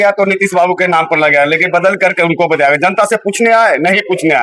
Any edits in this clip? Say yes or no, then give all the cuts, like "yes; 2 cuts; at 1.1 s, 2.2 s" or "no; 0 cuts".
no; 0 cuts